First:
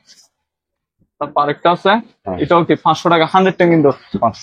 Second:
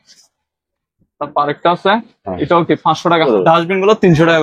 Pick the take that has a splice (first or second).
second